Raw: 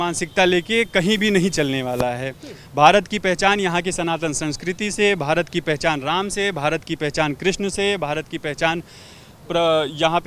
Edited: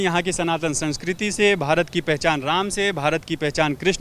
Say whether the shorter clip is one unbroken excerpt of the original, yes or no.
yes